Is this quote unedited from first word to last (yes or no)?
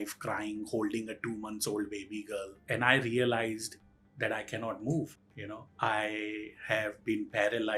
yes